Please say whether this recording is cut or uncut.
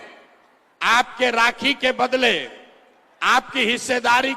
uncut